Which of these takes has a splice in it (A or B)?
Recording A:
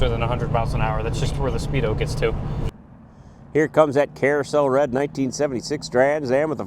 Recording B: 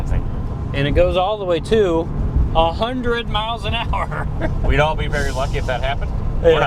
A